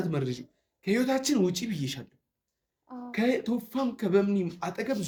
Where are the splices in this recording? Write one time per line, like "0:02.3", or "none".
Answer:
none